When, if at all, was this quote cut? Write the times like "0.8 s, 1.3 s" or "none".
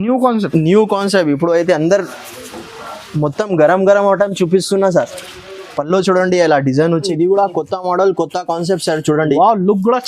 7.0 s